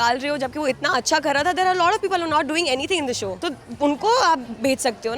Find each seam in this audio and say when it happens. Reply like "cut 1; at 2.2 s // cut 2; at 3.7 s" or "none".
cut 1; at 3.4 s

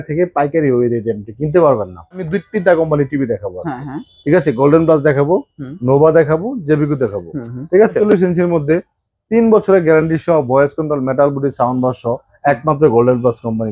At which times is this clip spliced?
cut 1; at 2.3 s // cut 2; at 8.0 s

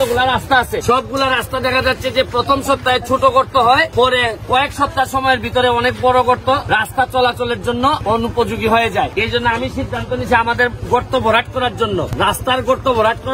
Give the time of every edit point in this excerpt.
cut 1; at 0.8 s // cut 2; at 3.9 s // cut 3; at 6.6 s // cut 4; at 8.0 s // cut 5; at 9.1 s // cut 6; at 12.1 s

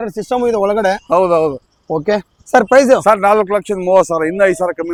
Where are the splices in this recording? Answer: none

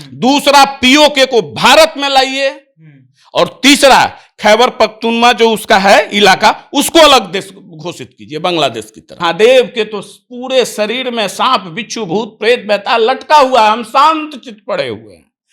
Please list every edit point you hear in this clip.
cut 1; at 9.0 s

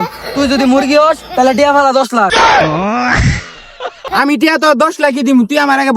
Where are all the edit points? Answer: cut 1; at 2.3 s // cut 2; at 4.0 s

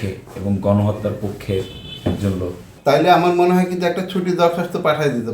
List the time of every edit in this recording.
cut 1; at 2.7 s

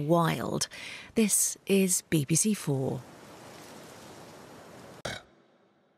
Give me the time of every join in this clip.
cut 1; at 5.1 s

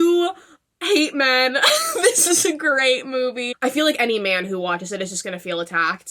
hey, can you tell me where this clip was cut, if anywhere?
cut 1; at 3.5 s

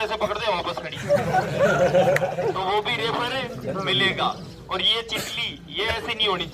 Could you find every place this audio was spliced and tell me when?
none

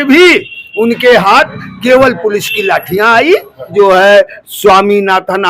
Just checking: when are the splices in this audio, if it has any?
cut 1; at 3.7 s

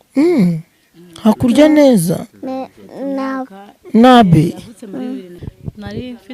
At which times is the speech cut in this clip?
cut 1; at 5.3 s

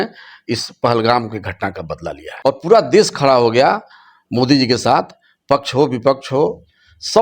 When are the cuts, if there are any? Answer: cut 1; at 2.3 s

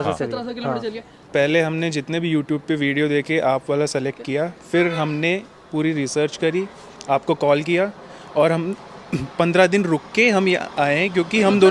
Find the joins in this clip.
cut 1; at 1.3 s

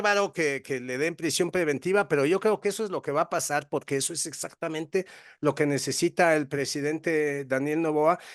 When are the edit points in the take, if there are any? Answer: none

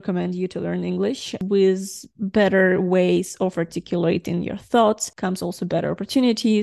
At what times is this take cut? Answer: cut 1; at 1.3 s // cut 2; at 5.1 s

